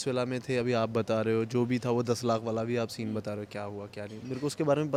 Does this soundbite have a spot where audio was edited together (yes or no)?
no